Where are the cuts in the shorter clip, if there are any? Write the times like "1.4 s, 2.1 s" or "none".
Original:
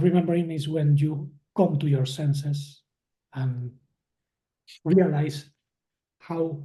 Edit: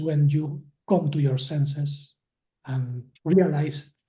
3.1 s